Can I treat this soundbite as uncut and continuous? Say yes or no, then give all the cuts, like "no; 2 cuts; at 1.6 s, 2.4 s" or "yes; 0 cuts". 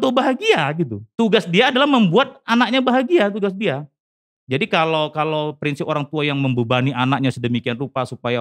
no; 1 cut; at 1.0 s